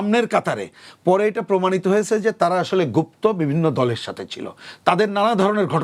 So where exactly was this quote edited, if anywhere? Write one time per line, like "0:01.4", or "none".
none